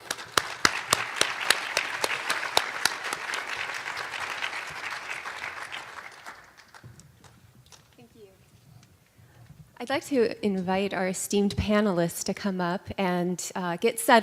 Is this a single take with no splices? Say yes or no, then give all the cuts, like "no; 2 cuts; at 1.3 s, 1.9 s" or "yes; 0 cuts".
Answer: yes; 0 cuts